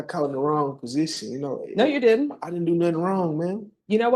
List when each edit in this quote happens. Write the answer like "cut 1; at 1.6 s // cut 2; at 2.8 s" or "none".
none